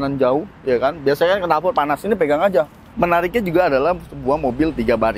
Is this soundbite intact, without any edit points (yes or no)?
no